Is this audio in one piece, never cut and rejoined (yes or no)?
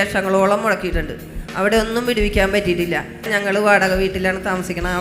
yes